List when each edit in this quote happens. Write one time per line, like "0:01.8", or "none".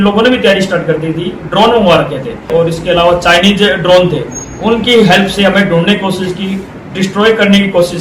none